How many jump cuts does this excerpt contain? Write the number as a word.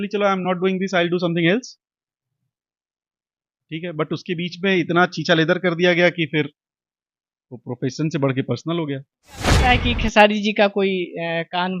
one